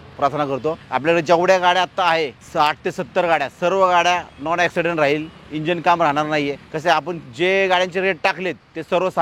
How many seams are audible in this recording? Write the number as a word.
three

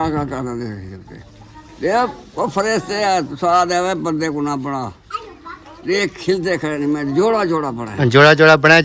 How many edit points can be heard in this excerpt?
zero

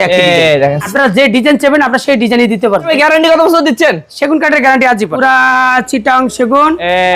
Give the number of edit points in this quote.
three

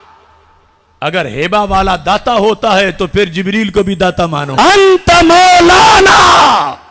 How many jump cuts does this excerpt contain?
one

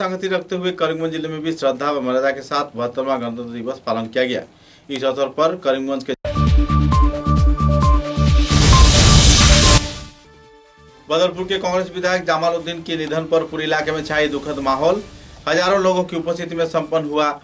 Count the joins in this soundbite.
two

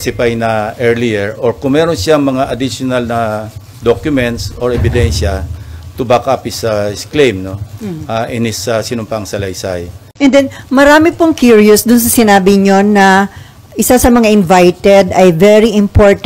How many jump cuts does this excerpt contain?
one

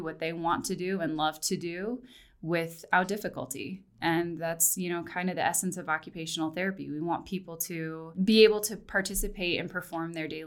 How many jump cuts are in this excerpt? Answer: one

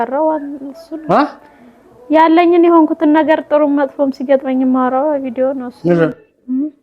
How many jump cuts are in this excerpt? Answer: one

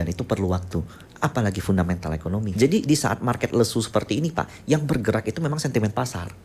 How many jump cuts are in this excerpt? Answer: one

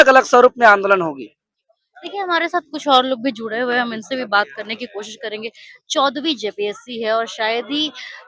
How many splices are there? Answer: zero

